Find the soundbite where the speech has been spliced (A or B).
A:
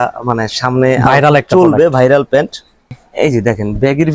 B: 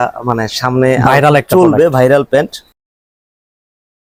A